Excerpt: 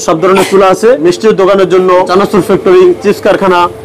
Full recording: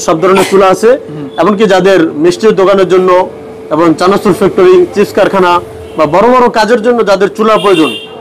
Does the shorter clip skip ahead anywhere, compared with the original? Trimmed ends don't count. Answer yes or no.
yes